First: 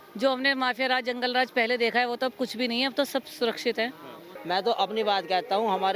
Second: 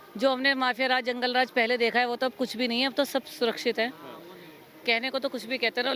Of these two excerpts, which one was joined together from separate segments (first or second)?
first